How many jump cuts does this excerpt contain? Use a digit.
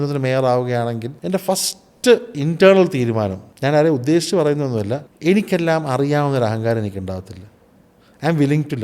3